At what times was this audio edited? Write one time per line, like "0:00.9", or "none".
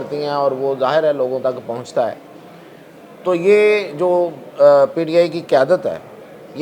none